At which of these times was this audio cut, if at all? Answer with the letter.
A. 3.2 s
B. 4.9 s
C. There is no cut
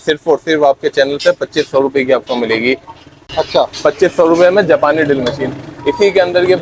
C